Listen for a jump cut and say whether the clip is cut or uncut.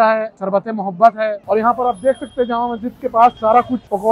cut